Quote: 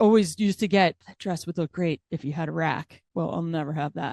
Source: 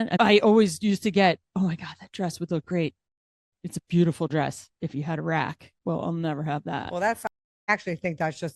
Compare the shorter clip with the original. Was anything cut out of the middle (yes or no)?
yes